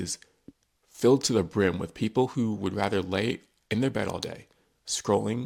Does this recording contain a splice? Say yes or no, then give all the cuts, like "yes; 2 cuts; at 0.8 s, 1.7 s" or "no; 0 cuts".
no; 0 cuts